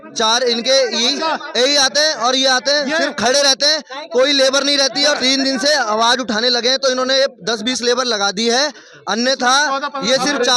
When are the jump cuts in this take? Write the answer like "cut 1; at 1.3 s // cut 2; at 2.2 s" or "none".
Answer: cut 1; at 5.2 s